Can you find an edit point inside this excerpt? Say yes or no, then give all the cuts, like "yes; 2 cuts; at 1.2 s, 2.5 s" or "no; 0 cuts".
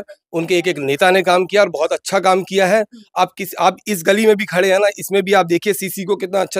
no; 0 cuts